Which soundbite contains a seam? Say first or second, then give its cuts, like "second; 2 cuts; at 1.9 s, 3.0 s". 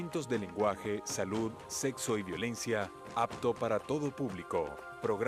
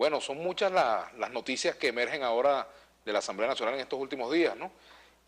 second; 1 cut; at 1.2 s